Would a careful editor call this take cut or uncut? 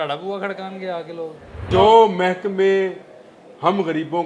cut